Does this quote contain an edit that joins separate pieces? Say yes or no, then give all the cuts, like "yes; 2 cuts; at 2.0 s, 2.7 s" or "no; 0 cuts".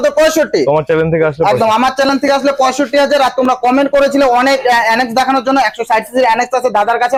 no; 0 cuts